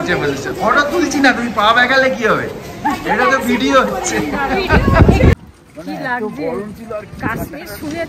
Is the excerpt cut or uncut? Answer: cut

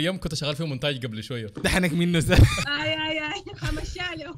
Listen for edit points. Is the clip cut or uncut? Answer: cut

